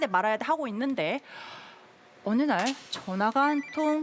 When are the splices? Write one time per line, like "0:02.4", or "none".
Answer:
none